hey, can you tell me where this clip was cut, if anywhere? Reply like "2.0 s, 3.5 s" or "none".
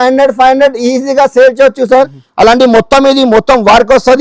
2.2 s

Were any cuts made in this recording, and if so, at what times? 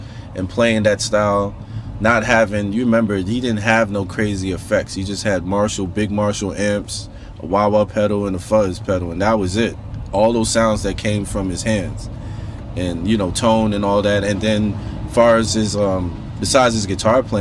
none

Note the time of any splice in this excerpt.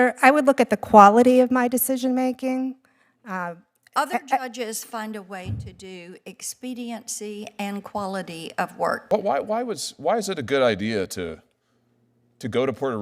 9.0 s

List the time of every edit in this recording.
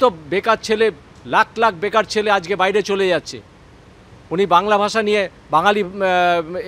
none

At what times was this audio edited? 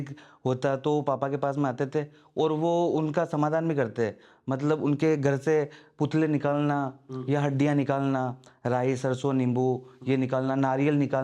none

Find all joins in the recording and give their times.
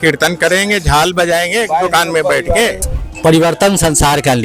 2.8 s

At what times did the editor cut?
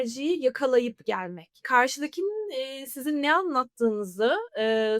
1.6 s

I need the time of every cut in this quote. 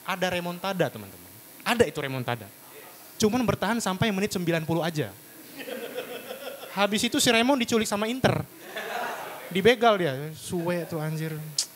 none

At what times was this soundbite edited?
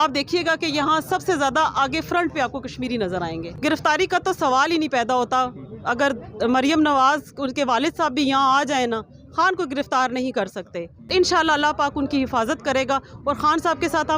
3.5 s, 11.1 s

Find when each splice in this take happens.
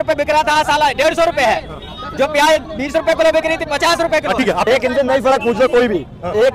4.7 s

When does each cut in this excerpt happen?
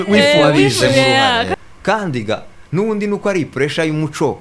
1.5 s

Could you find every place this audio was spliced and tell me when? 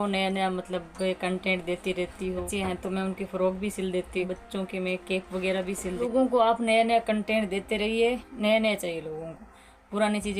2.5 s, 4.3 s, 6.0 s, 8.3 s

